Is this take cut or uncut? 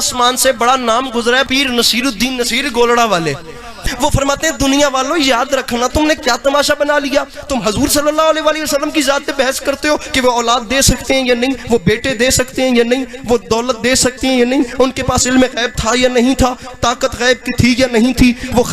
cut